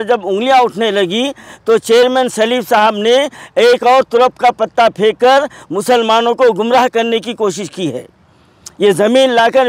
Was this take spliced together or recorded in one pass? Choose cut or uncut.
uncut